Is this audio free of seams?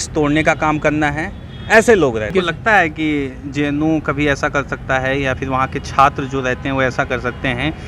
no; 1 cut; at 2.3 s

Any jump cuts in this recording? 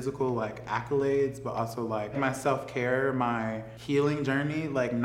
yes; 2 cuts; at 2.2 s, 3.7 s

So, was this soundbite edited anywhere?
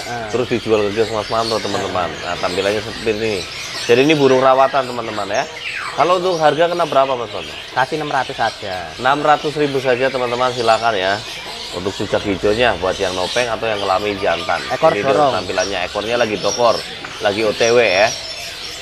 no; 0 cuts

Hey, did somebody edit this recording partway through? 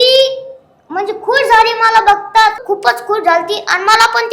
yes; 1 cut; at 2.6 s

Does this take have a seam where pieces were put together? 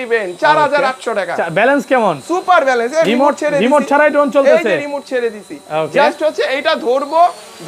no; 0 cuts

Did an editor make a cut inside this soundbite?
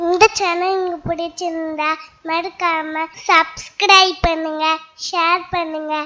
yes; 1 cut; at 3.2 s

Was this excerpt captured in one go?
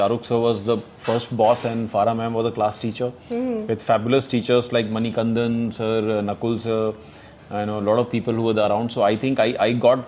yes; 0 cuts

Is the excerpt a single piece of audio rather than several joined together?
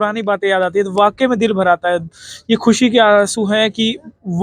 yes; 0 cuts

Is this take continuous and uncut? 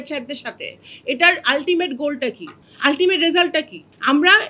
yes; 0 cuts

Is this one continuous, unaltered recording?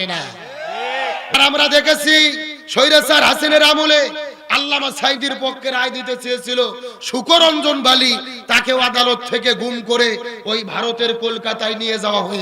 no; 1 cut; at 1.3 s

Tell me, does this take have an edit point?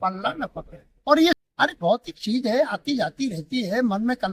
yes; 1 cut; at 1.4 s

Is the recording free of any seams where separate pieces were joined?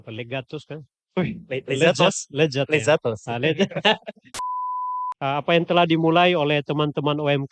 no; 1 cut; at 4.7 s

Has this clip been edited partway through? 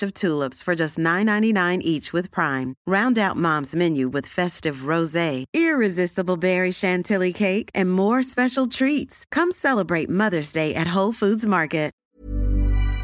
yes; 1 cut; at 12.0 s

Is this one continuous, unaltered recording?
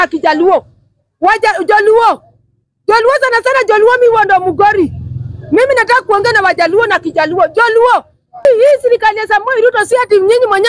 no; 1 cut; at 8.4 s

